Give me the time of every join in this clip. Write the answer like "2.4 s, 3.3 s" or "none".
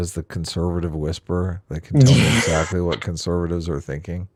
none

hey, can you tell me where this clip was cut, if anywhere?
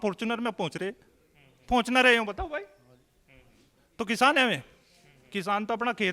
none

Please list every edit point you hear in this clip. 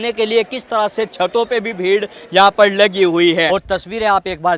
3.5 s

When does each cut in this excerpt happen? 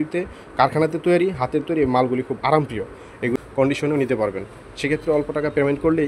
3.3 s

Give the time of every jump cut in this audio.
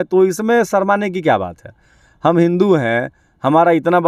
none

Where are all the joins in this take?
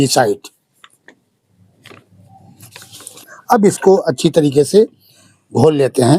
3.1 s

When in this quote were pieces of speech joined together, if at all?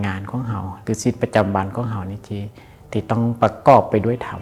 none

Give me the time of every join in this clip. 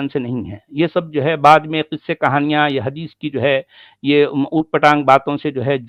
none

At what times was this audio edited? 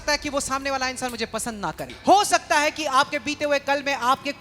1.9 s

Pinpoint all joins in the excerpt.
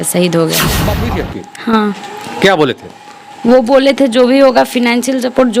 0.9 s

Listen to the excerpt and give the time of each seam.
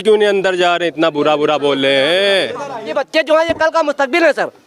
2.9 s

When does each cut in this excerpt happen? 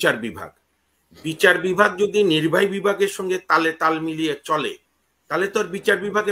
none

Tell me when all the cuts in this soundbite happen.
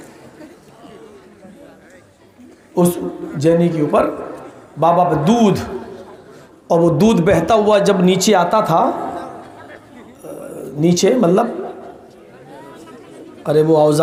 none

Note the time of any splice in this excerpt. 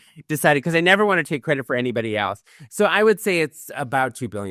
none

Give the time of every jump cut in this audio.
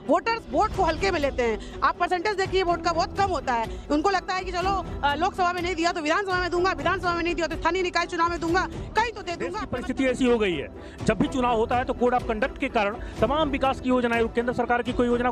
9.6 s

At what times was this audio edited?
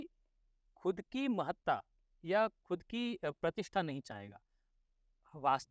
4.8 s

